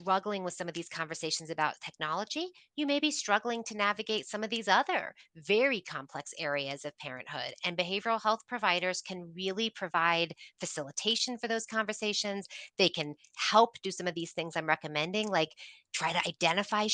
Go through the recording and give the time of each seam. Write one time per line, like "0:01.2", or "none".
none